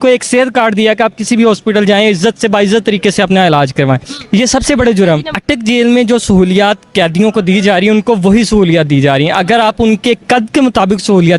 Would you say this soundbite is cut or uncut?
cut